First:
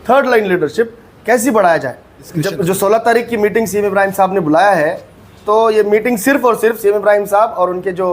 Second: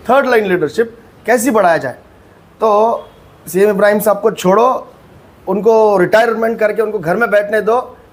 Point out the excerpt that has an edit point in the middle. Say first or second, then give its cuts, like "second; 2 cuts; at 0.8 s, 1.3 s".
first; 1 cut; at 2.2 s